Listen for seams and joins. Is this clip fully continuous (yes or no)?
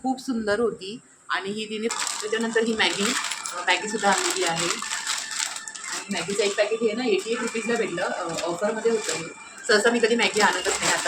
no